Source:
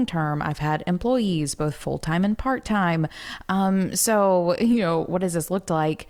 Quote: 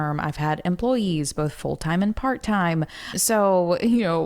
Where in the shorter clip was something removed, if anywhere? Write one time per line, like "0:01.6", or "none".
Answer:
0:03.2